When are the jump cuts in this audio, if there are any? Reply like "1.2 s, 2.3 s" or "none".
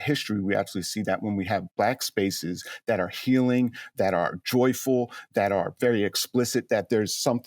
1.7 s